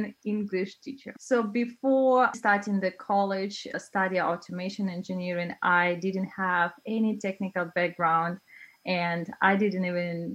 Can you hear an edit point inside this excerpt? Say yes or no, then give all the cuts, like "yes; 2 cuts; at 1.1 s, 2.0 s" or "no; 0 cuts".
no; 0 cuts